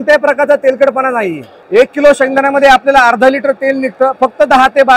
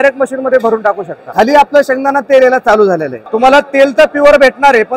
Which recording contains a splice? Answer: second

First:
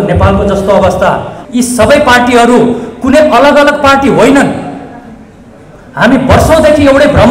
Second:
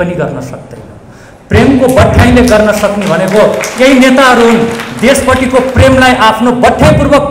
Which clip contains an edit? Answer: first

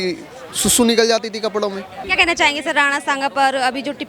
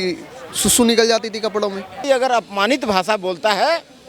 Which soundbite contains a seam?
second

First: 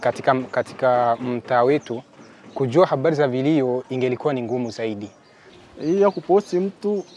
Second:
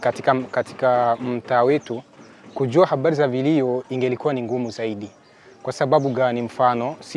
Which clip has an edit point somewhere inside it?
first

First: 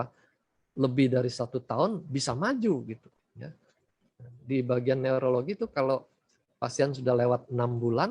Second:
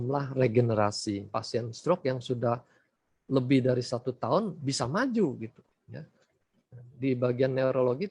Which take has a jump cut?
second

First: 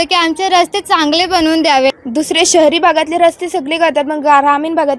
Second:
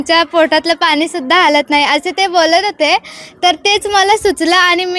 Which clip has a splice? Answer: first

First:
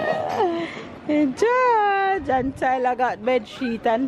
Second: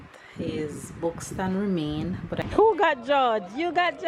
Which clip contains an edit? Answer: second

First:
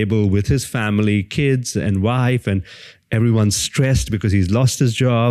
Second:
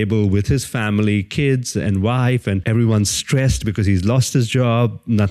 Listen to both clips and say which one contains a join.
second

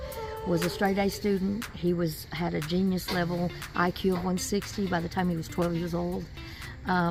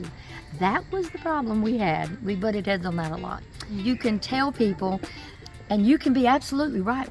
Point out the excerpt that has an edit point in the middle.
second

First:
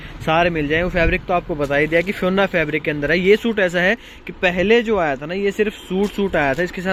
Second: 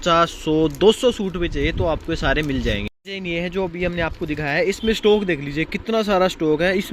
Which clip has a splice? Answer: second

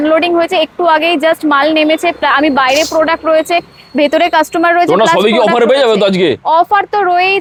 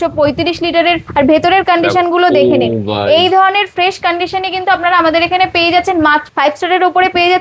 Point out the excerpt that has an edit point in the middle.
second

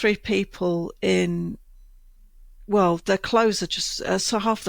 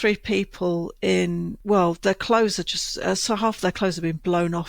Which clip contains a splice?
second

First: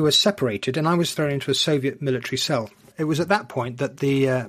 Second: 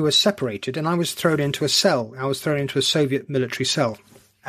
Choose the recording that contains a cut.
first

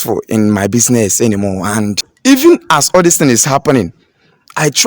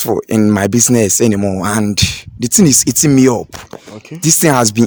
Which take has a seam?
first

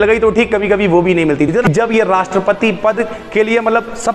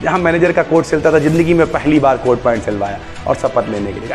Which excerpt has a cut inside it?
first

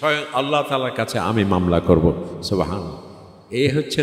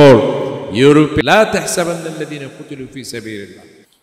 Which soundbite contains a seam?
second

